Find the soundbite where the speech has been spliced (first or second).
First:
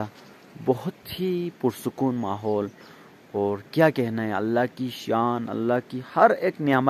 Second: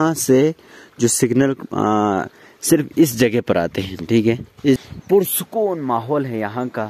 second